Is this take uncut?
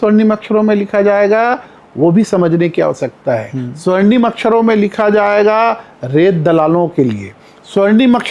yes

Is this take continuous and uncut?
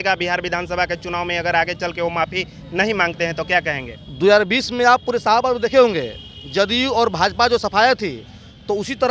yes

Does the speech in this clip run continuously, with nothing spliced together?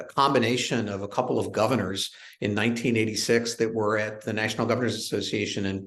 yes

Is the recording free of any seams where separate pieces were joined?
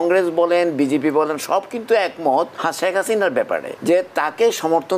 no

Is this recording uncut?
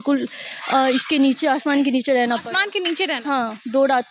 yes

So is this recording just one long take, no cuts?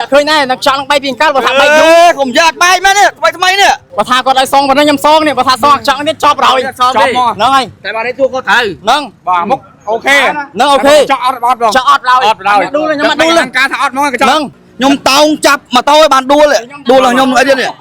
no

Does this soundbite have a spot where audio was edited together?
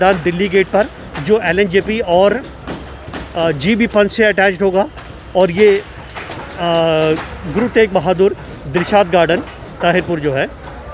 no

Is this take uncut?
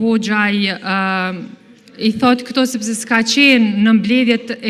yes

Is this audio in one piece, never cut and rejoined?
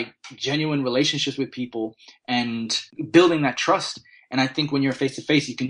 no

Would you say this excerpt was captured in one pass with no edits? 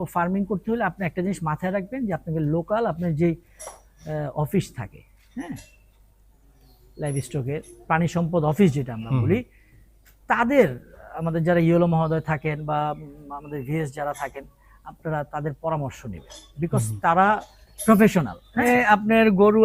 no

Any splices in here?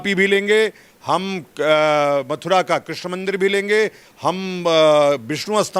no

